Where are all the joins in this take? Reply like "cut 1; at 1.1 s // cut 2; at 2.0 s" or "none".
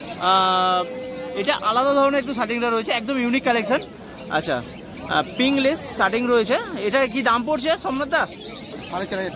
none

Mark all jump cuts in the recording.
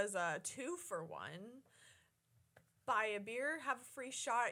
none

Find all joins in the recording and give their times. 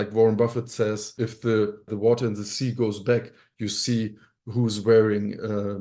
cut 1; at 1.1 s

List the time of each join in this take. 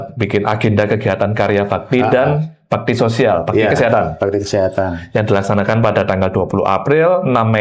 none

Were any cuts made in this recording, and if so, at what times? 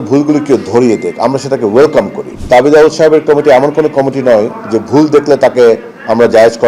cut 1; at 2.3 s

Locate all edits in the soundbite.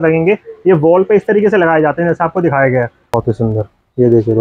cut 1; at 3.1 s

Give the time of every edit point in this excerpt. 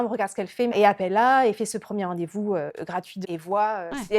cut 1; at 3.2 s

